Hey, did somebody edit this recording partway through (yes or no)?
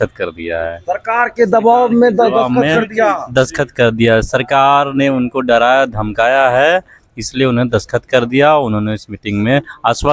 no